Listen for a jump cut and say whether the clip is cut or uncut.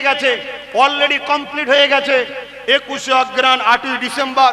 uncut